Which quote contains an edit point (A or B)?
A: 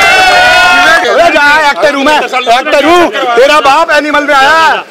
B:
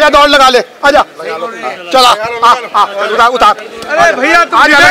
A